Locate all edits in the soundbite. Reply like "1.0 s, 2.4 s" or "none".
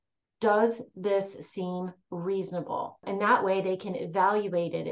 3.0 s